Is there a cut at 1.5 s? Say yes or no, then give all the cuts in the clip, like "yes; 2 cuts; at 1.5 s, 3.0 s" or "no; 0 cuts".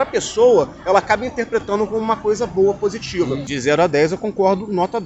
no; 1 cut; at 3.5 s